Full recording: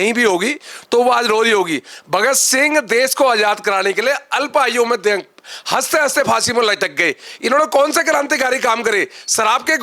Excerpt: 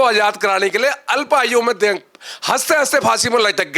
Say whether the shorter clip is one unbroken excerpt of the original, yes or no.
yes